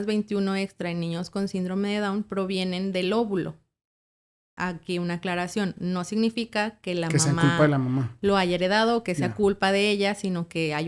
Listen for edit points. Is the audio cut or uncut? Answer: uncut